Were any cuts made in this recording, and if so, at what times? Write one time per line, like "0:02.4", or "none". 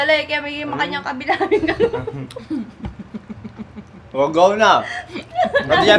none